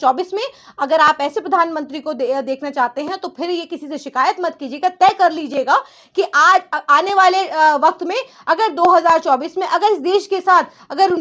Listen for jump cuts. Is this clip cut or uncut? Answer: uncut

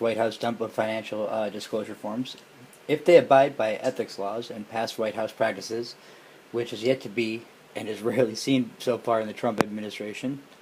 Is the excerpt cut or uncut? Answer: uncut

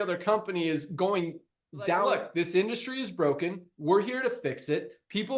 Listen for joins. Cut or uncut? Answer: cut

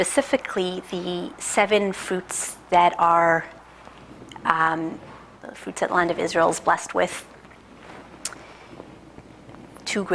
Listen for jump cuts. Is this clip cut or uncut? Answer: uncut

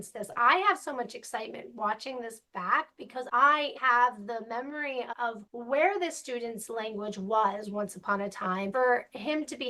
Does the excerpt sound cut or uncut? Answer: cut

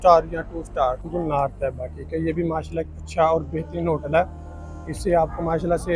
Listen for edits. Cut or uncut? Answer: cut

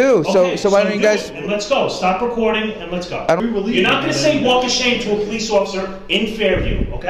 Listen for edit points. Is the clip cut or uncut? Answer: cut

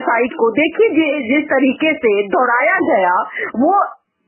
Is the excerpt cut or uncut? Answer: uncut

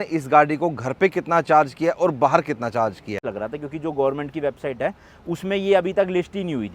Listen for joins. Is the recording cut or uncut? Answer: cut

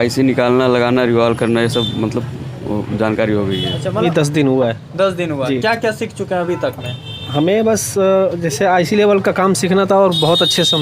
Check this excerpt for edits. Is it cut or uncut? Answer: cut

